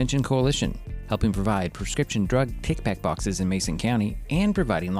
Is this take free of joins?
yes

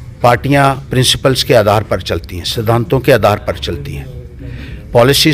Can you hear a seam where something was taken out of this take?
no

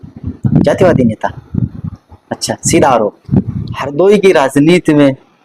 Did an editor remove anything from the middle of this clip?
yes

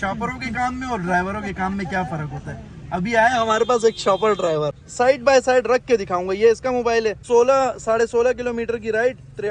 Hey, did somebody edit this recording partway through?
yes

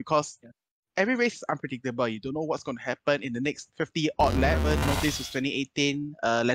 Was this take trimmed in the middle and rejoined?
yes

